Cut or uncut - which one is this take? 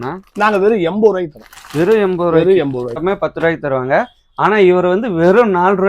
cut